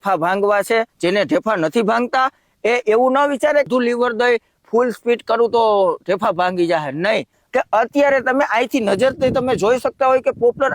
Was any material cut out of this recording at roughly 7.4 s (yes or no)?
yes